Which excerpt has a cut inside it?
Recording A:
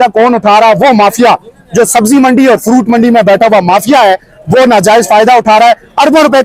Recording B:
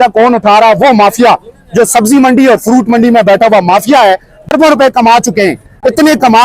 B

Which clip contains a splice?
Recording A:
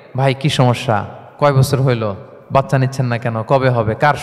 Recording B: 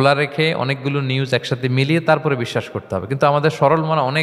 A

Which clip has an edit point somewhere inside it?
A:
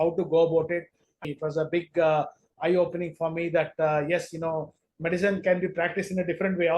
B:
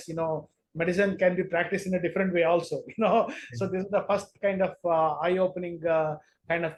A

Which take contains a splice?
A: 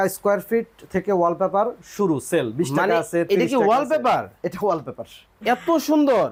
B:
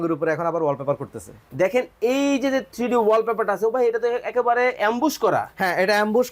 B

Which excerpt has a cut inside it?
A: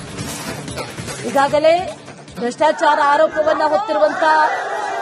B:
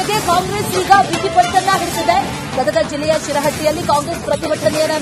A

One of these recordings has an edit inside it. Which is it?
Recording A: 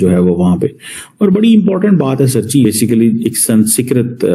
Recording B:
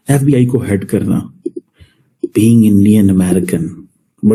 A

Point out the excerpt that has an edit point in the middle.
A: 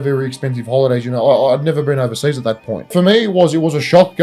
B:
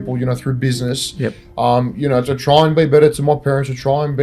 A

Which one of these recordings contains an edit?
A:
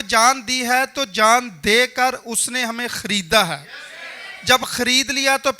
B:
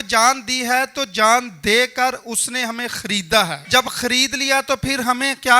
B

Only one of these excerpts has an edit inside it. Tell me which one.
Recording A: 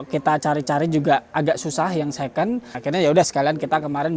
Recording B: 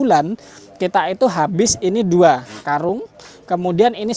A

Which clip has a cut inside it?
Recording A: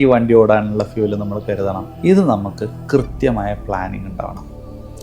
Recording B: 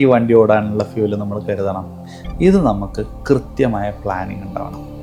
A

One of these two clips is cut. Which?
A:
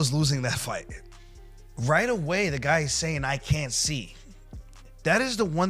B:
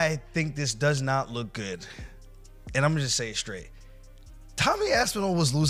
A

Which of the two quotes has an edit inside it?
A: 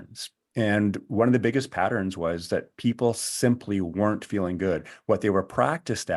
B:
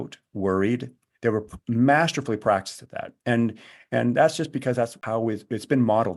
B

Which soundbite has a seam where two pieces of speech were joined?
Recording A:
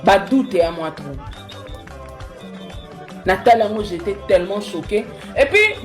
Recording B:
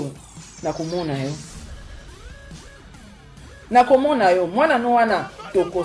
A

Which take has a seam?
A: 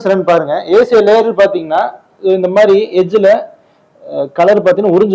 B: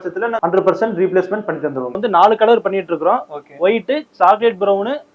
B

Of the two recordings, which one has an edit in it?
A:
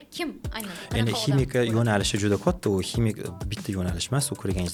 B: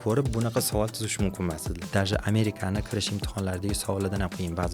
B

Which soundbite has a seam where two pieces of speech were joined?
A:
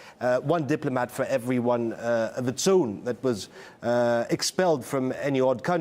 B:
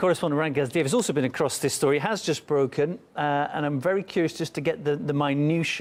A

